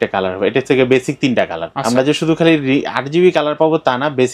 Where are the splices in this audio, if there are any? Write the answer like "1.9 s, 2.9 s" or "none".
1.6 s